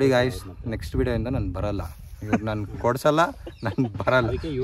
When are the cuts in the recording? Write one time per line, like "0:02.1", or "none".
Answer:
none